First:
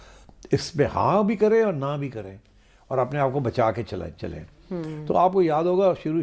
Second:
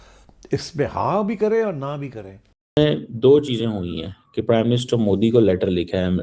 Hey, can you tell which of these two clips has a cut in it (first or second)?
second